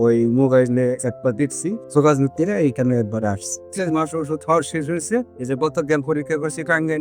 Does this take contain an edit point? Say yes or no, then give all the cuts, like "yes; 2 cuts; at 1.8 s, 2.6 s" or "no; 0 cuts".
yes; 2 cuts; at 1.8 s, 3.7 s